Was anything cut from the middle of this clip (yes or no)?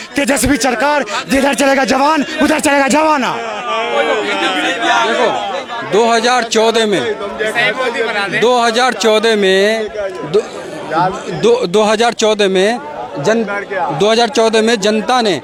no